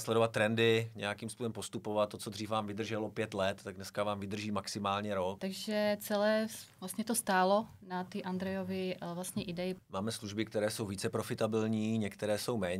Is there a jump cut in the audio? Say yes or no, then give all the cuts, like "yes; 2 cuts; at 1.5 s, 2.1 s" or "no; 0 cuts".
yes; 2 cuts; at 5.4 s, 9.8 s